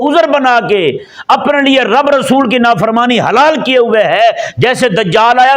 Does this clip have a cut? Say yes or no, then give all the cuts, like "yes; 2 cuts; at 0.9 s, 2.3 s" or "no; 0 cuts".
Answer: no; 0 cuts